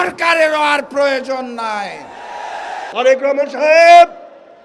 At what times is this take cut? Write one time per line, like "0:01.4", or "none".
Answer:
0:02.9